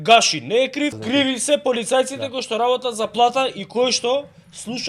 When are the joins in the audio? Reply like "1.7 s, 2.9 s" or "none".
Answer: 1.0 s